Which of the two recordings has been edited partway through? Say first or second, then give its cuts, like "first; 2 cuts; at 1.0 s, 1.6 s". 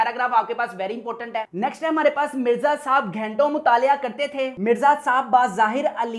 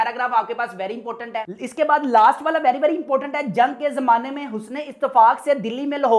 first; 1 cut; at 1.5 s